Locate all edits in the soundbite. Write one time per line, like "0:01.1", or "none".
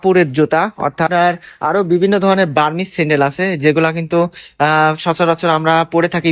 0:01.1